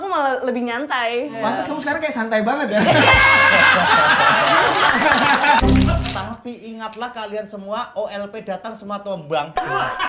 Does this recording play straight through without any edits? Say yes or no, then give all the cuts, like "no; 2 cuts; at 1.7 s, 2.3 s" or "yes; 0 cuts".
no; 2 cuts; at 1.3 s, 5.6 s